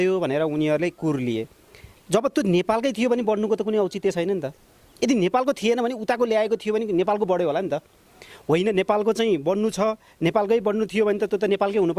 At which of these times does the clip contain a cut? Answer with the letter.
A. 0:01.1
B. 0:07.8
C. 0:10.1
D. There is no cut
D